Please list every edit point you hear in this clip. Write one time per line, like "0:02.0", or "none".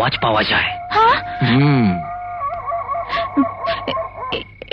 none

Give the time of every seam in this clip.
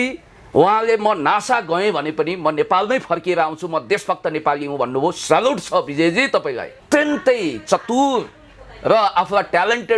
0:06.8

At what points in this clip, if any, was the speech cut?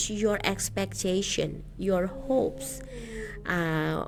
none

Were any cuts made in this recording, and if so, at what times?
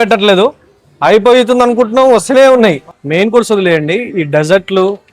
0:02.9

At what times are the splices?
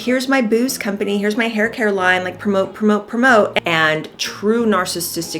0:03.5

